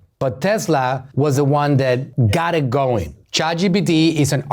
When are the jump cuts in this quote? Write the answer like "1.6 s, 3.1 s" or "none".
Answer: 1.0 s, 2.1 s, 3.2 s